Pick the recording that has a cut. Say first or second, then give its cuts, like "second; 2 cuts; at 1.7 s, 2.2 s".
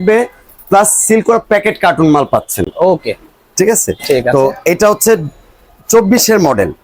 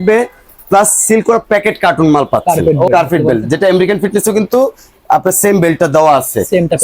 second; 1 cut; at 2.4 s